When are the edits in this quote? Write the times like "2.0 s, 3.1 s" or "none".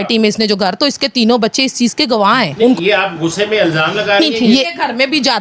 2.8 s, 4.7 s